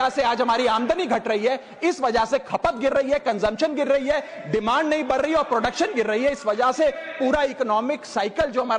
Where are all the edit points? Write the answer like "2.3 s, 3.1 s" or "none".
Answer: none